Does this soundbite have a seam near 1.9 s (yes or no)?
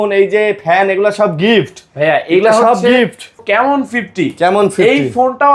no